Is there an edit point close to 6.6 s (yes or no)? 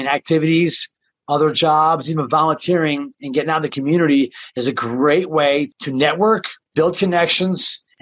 yes